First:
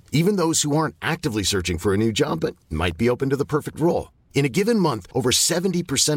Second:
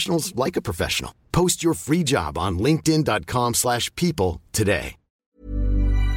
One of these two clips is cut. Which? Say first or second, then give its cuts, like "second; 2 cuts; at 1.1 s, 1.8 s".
second; 1 cut; at 5.2 s